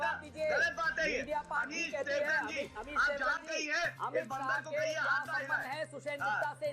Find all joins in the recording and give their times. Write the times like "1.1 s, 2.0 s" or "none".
none